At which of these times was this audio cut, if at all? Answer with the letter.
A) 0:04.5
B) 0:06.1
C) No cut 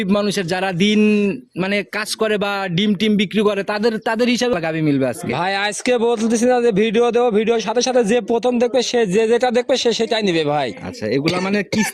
A